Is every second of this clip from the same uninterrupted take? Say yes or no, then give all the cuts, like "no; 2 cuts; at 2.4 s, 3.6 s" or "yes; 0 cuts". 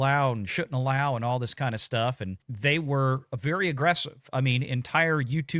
yes; 0 cuts